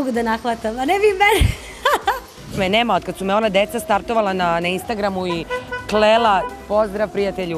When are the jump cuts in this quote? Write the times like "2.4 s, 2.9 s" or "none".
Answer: 2.5 s

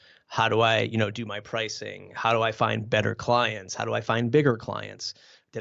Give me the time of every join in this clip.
none

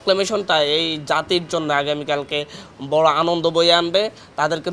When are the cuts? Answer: none

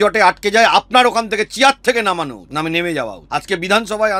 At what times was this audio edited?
2.4 s, 3.2 s

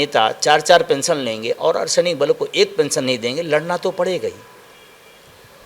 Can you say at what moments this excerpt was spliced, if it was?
none

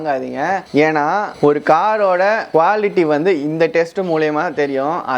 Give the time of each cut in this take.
2.4 s

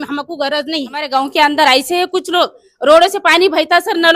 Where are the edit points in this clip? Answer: 1.1 s

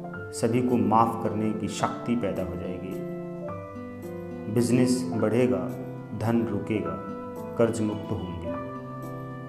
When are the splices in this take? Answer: none

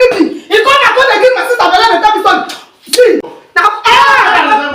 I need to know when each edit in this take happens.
3.3 s

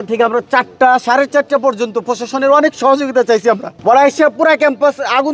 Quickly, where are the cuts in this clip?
none

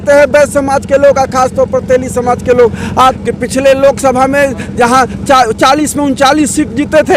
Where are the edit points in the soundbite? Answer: 3.2 s

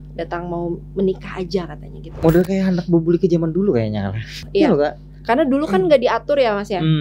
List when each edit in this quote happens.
2.1 s, 4.4 s

